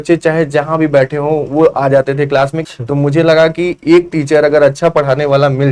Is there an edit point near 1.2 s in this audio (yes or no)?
no